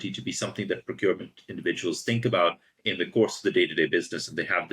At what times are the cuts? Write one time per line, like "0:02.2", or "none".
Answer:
none